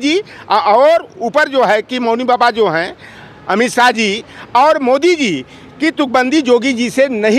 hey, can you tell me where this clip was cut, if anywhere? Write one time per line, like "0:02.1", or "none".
none